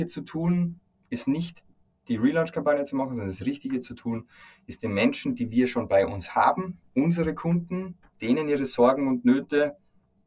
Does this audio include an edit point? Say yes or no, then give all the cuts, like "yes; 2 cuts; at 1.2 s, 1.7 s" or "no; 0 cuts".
no; 0 cuts